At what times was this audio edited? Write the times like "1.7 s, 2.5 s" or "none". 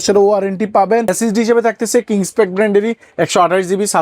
1.1 s